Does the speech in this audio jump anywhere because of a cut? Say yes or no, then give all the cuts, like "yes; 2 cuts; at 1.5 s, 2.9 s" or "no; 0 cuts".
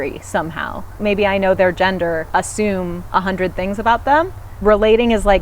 yes; 3 cuts; at 1.0 s, 2.2 s, 4.4 s